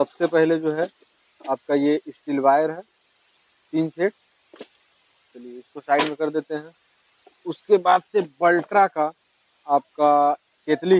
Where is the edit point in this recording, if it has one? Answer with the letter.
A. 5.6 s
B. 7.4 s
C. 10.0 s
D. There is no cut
D